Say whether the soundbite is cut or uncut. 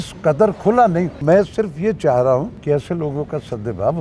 cut